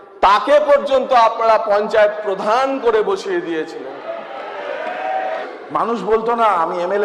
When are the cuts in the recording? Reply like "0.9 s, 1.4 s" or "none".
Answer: 5.4 s